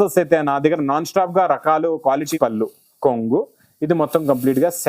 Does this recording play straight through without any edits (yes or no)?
no